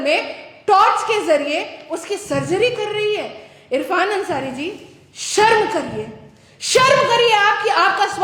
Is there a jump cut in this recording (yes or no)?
no